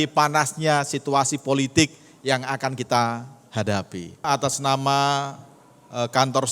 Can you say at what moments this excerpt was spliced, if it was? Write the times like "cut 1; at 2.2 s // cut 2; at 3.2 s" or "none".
cut 1; at 4.3 s